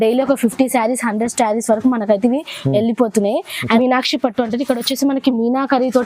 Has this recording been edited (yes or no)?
yes